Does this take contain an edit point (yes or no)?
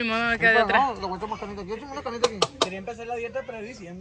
no